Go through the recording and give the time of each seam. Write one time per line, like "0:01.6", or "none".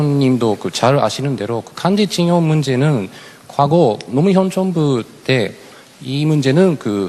0:05.7